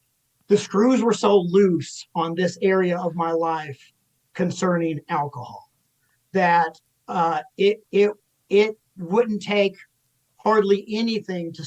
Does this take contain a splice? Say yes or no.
no